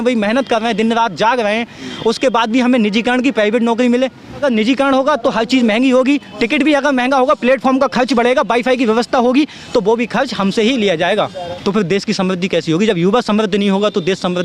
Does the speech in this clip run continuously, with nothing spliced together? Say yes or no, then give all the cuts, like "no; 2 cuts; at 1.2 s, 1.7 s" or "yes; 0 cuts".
no; 2 cuts; at 4.4 s, 11.4 s